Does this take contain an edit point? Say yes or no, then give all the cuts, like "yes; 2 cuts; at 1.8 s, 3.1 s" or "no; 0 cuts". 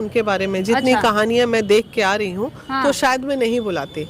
no; 0 cuts